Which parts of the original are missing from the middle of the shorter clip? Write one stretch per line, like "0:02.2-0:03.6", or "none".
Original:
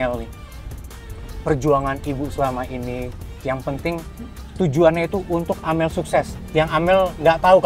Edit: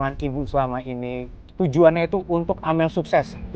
0:03.2-0:04.4